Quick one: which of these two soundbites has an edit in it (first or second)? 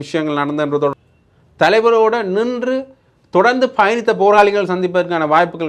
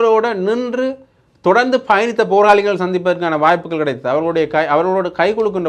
first